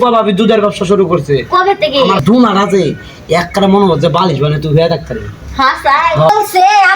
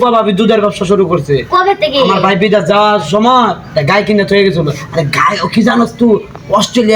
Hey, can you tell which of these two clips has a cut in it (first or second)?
first